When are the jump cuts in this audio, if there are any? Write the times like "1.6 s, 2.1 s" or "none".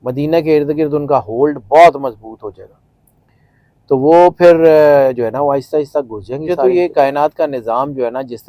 6.5 s